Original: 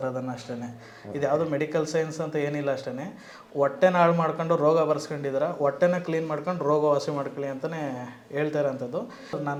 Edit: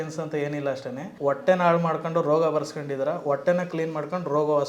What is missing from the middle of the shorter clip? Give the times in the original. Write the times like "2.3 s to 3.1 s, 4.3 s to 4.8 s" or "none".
3.0 s to 3.4 s